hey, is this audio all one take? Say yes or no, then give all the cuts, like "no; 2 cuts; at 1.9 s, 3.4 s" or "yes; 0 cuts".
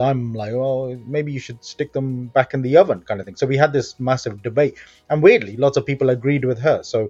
yes; 0 cuts